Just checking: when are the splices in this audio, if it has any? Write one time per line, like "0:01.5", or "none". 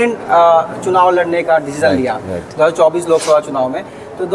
none